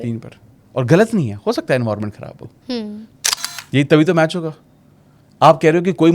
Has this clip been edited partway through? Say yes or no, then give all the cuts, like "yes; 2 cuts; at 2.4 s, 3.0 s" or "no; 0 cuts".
yes; 1 cut; at 3.1 s